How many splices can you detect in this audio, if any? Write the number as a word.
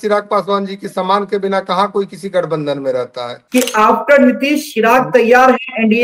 one